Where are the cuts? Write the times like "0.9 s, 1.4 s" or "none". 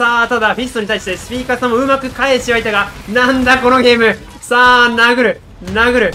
none